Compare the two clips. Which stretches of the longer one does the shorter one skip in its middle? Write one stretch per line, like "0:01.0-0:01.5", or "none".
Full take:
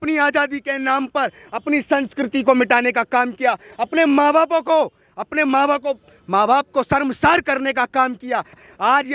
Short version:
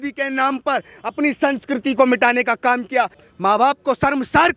0:03.7-0:06.1

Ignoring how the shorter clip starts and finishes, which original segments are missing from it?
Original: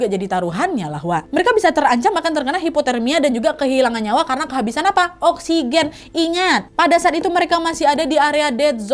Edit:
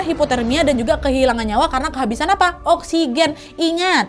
none

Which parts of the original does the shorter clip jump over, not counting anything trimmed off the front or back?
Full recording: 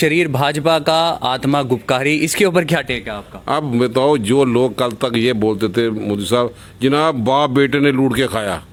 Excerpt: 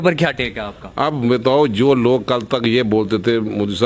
none

